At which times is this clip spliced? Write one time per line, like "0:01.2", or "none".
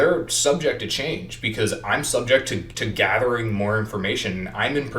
0:02.8